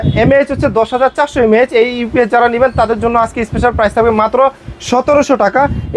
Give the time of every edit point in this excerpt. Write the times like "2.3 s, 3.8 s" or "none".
none